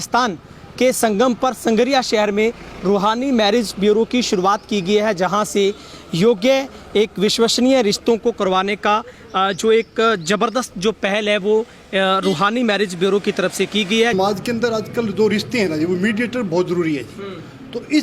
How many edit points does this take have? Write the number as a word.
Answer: one